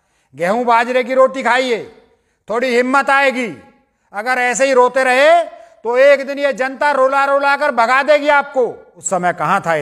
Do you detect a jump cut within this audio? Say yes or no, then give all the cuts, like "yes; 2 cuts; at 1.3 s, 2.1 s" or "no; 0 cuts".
yes; 1 cut; at 8.9 s